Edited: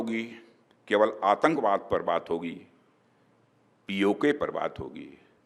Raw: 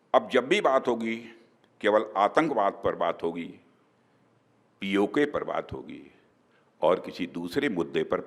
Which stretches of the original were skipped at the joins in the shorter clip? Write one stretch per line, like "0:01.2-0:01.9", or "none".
none